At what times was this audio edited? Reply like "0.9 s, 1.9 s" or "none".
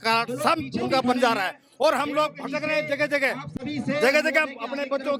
none